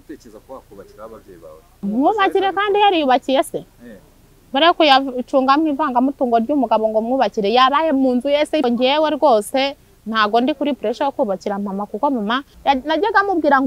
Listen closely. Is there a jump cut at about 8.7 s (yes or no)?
yes